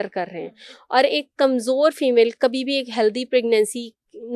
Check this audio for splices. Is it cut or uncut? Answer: uncut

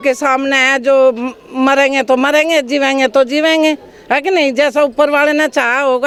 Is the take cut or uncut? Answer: uncut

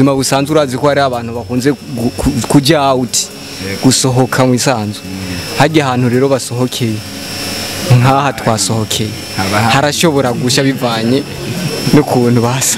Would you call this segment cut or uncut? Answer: uncut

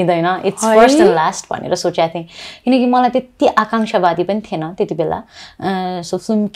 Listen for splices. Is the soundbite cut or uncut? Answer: uncut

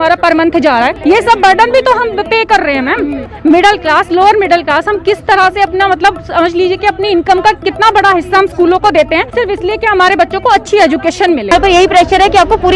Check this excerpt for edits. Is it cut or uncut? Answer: cut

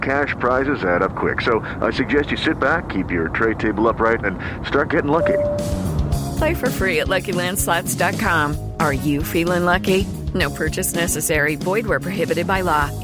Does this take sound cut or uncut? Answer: uncut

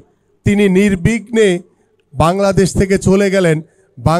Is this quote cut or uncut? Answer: uncut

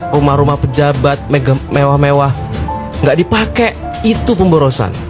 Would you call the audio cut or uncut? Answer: uncut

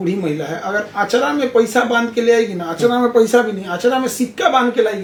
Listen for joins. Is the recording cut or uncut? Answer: uncut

